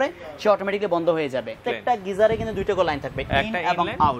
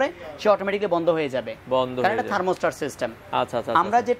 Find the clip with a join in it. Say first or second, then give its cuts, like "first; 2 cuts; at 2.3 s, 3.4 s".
first; 1 cut; at 1.6 s